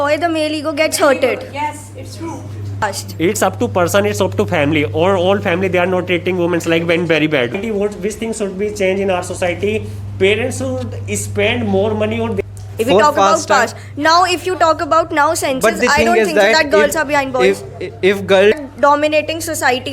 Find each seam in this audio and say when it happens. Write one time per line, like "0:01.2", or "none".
0:02.8
0:07.6
0:12.4
0:18.5